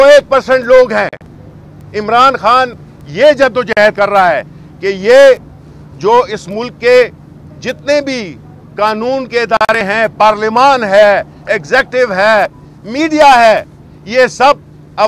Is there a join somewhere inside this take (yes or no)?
no